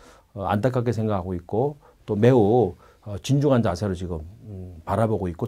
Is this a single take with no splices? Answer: yes; 0 cuts

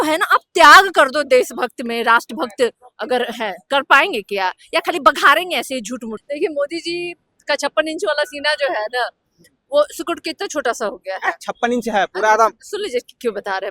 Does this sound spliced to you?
yes; 1 cut; at 6.2 s

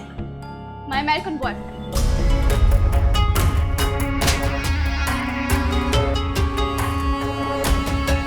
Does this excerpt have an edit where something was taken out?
no; 0 cuts

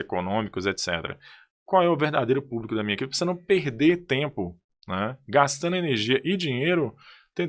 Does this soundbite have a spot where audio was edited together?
no; 0 cuts

